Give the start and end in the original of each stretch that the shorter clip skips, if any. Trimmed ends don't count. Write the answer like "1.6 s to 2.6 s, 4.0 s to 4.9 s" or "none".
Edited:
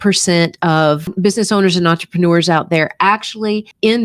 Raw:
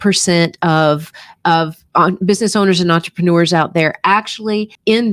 1.1 s to 2.2 s